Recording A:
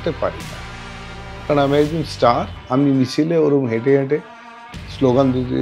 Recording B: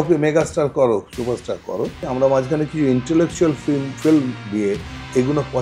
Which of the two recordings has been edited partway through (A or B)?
B